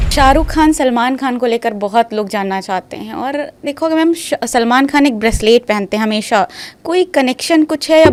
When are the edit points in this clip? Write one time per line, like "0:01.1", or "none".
none